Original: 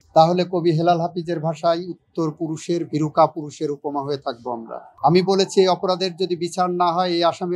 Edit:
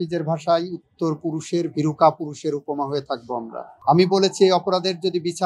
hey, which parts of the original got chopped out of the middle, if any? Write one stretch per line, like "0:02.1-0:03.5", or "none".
none